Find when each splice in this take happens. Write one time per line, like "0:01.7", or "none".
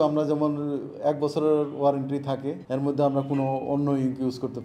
none

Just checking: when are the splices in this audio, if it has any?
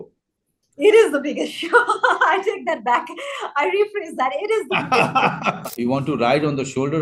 0:05.6

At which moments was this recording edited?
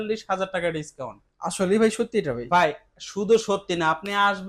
none

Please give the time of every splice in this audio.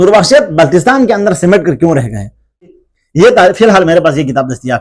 0:02.8

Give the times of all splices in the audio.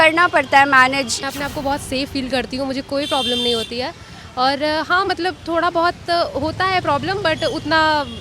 0:01.2

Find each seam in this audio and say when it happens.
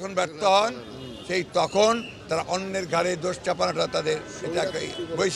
none

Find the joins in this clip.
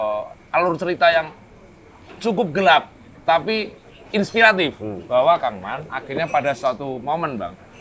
0:04.9

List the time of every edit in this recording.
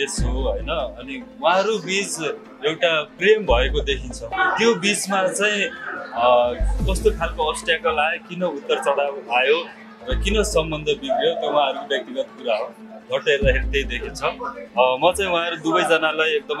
0:02.8
0:04.3

